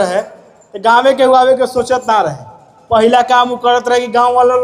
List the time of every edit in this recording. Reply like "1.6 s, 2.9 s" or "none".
none